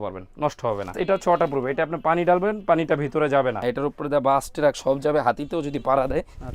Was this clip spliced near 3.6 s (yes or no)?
yes